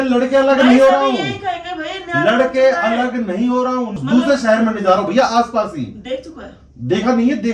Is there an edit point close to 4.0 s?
yes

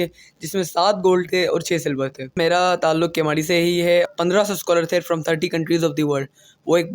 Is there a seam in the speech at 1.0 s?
no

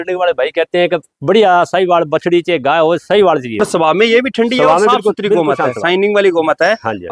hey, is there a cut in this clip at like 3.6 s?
yes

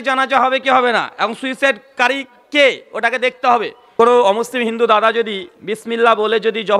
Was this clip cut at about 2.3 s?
no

